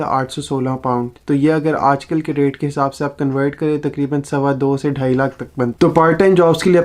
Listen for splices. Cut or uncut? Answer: cut